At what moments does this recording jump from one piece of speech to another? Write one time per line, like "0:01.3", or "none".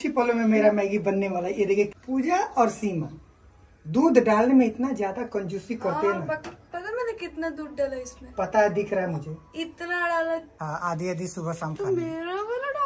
0:02.0
0:10.5